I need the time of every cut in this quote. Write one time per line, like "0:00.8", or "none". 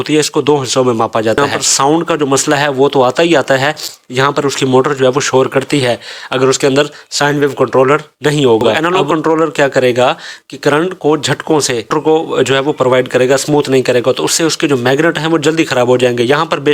0:01.4
0:08.8
0:11.9